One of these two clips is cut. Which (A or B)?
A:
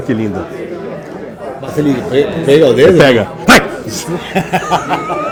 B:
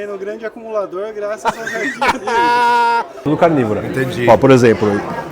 B